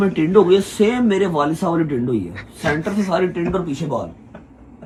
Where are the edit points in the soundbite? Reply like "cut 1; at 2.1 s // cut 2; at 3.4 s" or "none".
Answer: none